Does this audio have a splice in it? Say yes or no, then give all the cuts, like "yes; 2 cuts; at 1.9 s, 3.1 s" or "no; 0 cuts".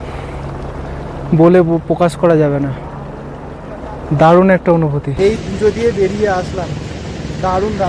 yes; 1 cut; at 5.0 s